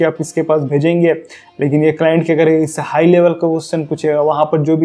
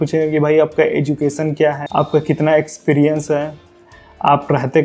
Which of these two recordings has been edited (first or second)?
second